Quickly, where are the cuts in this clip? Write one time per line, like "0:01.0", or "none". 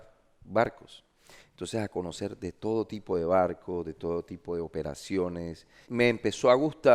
0:05.8